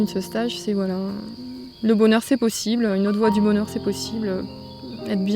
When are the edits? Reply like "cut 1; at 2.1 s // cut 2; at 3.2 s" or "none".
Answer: none